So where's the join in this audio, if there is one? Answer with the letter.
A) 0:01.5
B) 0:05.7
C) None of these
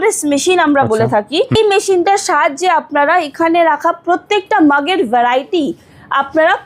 A